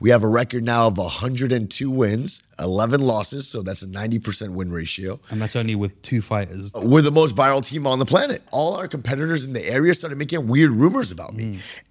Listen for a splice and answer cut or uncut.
cut